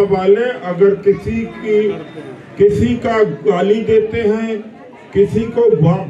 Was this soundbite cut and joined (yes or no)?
no